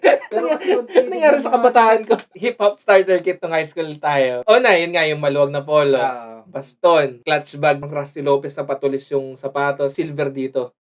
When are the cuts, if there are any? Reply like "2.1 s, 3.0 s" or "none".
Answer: 2.3 s, 4.4 s, 7.8 s, 9.9 s